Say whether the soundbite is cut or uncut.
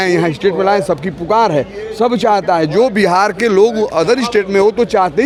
uncut